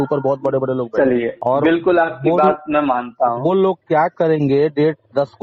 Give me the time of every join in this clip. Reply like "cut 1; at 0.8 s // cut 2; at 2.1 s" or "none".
cut 1; at 1.3 s